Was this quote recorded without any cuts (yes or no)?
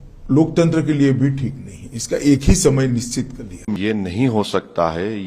no